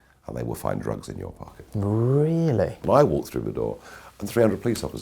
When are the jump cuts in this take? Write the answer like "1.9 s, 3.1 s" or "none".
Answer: 2.8 s